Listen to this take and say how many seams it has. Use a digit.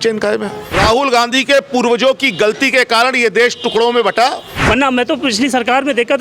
2